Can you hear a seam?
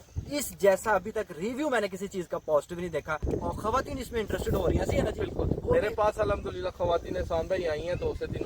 yes; 1 cut; at 3.2 s

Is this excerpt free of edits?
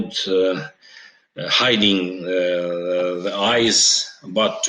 yes; 0 cuts

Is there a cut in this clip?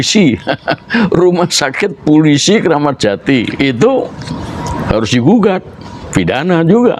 no; 0 cuts

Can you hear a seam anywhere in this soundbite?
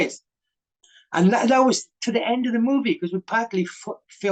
no; 0 cuts

